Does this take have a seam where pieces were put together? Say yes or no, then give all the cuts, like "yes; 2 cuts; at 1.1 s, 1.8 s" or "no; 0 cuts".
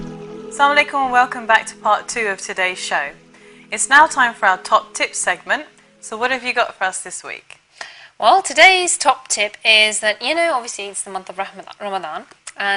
no; 0 cuts